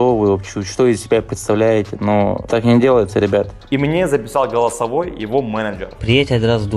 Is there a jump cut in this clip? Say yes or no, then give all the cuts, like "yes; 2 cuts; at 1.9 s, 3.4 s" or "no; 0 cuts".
yes; 3 cuts; at 2.4 s, 3.6 s, 5.9 s